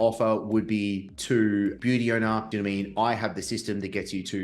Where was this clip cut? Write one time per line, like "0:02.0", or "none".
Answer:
0:01.1
0:02.5